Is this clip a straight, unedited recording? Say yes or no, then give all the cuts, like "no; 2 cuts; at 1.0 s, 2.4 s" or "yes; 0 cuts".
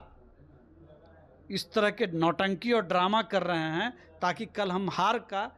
yes; 0 cuts